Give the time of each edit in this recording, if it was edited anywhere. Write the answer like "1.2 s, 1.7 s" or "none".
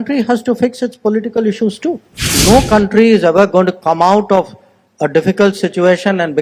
2.3 s